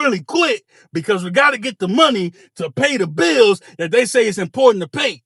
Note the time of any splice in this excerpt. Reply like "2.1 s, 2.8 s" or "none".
none